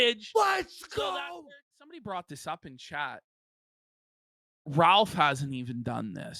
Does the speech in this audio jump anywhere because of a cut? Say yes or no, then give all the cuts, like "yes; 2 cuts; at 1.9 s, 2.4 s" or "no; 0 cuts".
yes; 1 cut; at 1.2 s